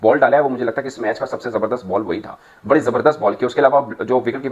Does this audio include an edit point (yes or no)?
no